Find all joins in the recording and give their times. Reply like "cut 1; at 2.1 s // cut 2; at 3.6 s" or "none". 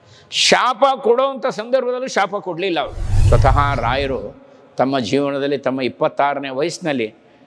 cut 1; at 3.1 s

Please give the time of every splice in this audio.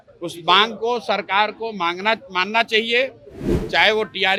none

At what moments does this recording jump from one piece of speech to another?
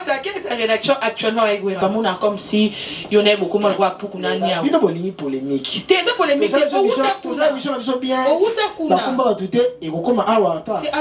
cut 1; at 1.8 s

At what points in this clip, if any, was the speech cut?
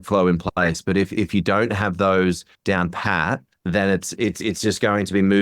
cut 1; at 2.5 s // cut 2; at 3.5 s

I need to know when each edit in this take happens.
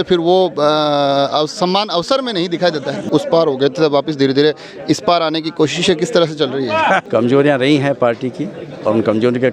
cut 1; at 3.0 s // cut 2; at 7.0 s

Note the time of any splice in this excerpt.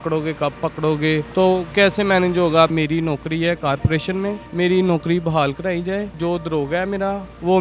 cut 1; at 1.3 s // cut 2; at 2.7 s // cut 3; at 4.4 s // cut 4; at 6.1 s

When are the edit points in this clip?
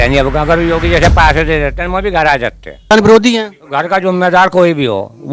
cut 1; at 2.9 s

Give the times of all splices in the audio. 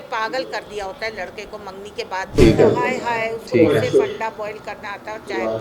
cut 1; at 2.4 s

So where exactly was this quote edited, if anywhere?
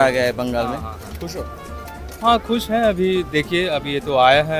none

